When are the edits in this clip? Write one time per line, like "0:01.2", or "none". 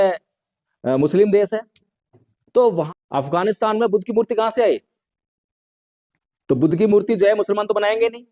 0:02.9